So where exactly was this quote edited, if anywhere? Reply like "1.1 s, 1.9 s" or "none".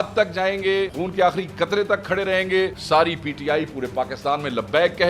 0.9 s, 2.8 s